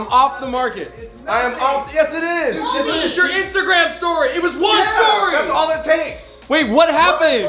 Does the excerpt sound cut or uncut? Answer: uncut